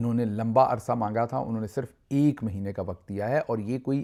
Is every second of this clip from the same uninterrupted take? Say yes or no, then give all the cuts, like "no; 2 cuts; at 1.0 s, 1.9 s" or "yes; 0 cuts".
yes; 0 cuts